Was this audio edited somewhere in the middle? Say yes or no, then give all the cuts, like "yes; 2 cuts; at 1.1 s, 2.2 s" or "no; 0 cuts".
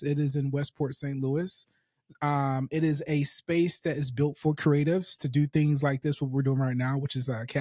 no; 0 cuts